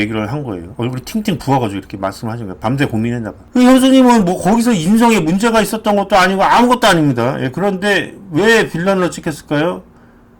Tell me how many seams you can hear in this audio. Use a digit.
1